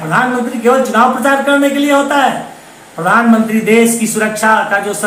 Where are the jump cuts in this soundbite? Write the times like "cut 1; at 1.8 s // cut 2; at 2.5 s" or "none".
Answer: none